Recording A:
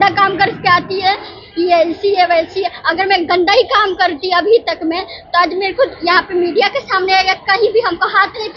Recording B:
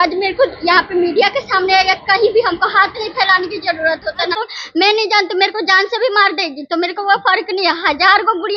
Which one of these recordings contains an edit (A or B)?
B